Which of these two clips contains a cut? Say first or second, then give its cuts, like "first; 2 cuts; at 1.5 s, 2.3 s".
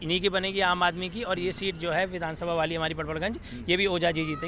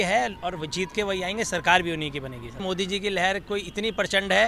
second; 1 cut; at 2.6 s